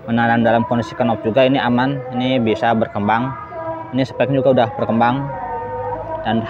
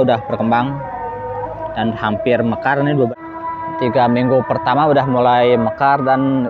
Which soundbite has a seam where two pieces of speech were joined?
second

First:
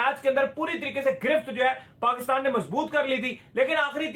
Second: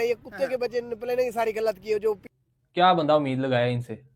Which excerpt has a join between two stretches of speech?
second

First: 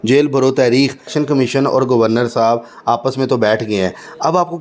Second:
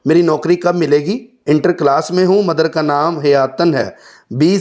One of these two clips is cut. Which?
first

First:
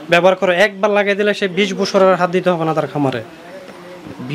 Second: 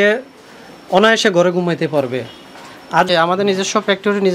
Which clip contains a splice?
second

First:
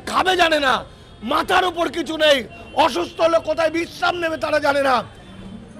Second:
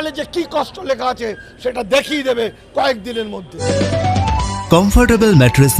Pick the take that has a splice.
second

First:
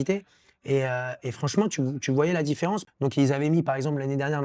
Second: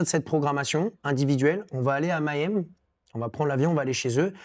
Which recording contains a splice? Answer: first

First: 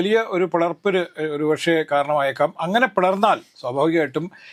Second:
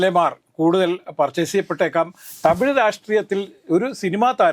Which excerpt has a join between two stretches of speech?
second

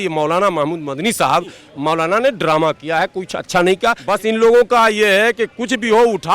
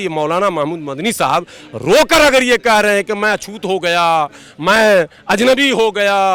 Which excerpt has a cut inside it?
first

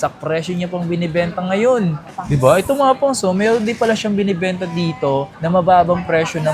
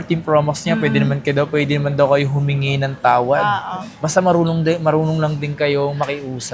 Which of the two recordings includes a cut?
first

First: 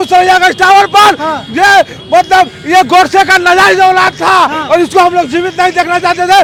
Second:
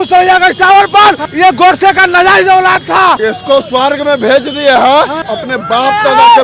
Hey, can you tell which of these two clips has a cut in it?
second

